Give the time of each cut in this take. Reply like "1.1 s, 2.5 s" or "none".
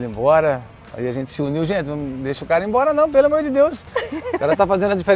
none